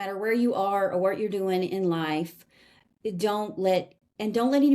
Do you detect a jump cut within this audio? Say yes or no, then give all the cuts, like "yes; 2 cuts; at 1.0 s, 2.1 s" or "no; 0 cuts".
no; 0 cuts